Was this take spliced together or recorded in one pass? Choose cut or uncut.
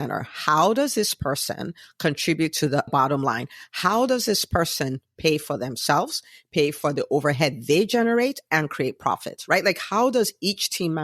cut